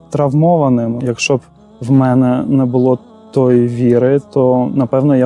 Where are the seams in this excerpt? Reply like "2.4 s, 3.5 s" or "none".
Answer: 1.0 s